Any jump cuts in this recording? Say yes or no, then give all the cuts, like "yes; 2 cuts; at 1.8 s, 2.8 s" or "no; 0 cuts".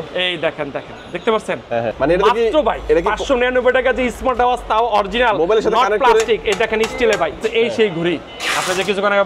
yes; 2 cuts; at 1.9 s, 7.5 s